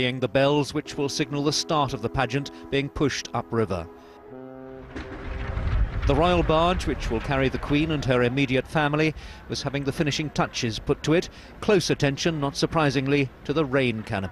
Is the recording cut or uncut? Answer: uncut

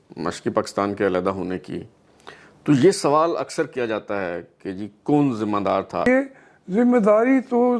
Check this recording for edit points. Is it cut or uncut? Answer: cut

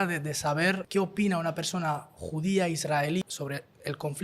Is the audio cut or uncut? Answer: cut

